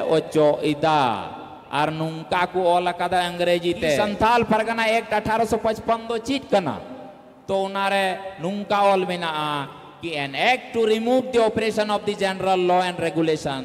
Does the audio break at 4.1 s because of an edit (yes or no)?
yes